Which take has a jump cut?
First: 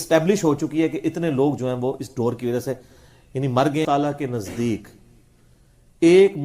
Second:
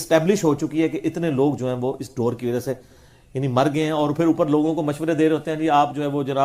first; 1 cut; at 3.9 s

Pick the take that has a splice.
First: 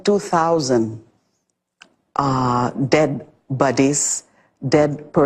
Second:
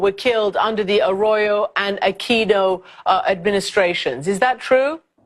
second; 1 cut; at 1.7 s

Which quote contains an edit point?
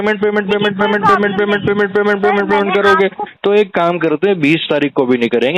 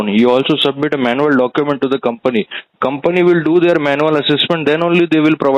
first; 1 cut; at 3.3 s

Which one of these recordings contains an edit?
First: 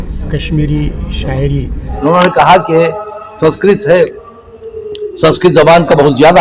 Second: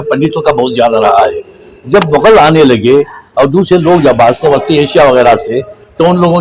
first; 1 cut; at 1.8 s

